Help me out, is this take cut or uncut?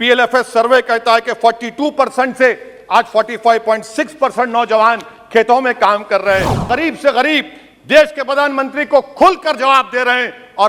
cut